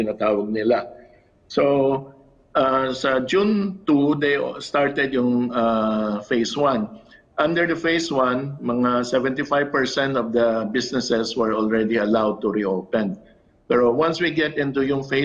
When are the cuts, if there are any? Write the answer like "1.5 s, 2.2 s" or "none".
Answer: none